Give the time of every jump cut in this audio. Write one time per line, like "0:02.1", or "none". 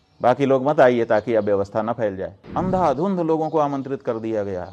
0:02.3